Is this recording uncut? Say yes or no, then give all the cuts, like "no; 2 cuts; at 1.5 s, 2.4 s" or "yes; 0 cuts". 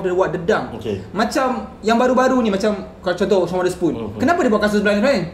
yes; 0 cuts